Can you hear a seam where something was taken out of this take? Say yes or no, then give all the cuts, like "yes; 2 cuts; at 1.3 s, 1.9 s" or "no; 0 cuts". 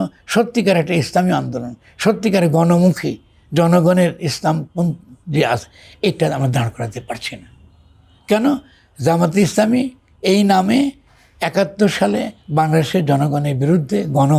no; 0 cuts